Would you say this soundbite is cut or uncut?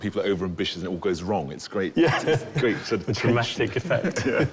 uncut